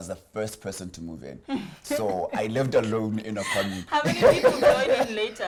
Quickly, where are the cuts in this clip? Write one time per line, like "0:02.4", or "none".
none